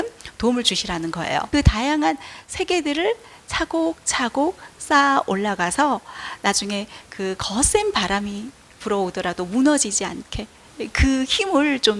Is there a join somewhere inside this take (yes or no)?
yes